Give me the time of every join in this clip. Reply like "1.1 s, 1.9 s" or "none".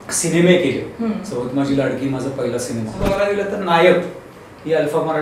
3.0 s

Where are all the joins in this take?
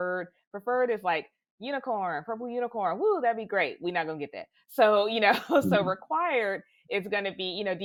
none

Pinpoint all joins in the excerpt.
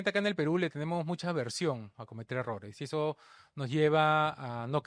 none

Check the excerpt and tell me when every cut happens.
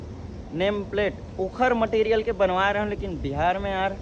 none

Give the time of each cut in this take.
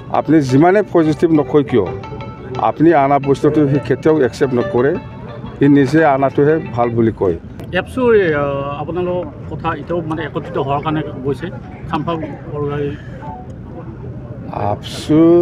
7.6 s

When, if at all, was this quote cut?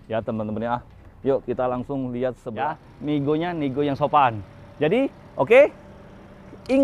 2.5 s

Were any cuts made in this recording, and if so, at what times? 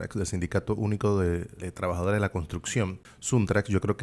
1.6 s, 3.1 s

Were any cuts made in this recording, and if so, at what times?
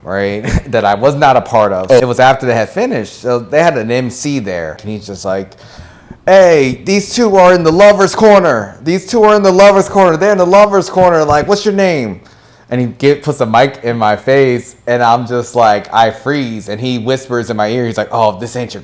2.0 s, 4.8 s

